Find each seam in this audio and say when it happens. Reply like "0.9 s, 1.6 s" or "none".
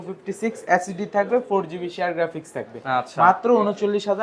none